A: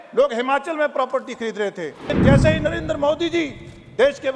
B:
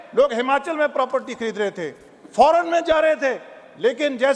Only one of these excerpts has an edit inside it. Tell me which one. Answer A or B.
A